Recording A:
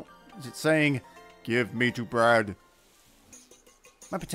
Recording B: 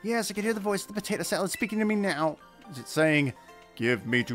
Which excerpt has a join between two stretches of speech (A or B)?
A